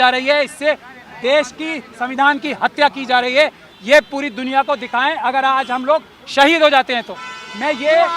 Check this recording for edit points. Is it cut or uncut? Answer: uncut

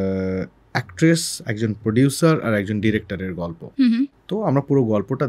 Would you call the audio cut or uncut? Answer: uncut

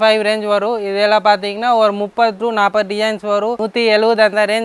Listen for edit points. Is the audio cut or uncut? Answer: cut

